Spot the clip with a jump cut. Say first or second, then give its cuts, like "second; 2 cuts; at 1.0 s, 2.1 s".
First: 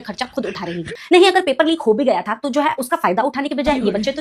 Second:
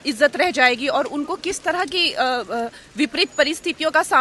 first; 1 cut; at 0.9 s